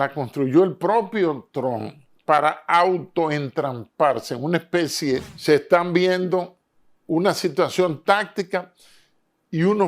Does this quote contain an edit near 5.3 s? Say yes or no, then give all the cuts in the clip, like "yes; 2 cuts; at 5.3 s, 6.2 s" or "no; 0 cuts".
yes; 1 cut; at 5.3 s